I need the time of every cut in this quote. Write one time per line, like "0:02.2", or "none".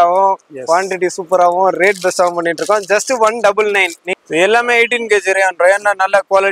0:04.1